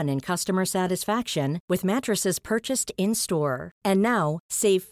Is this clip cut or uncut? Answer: uncut